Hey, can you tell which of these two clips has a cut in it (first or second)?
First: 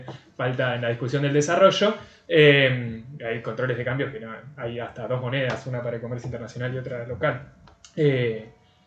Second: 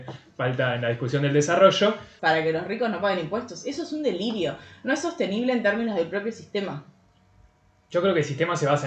second